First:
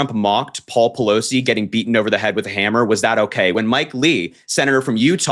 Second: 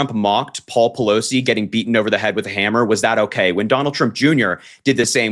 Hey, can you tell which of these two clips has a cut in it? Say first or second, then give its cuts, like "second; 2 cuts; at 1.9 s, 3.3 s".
first; 1 cut; at 3.5 s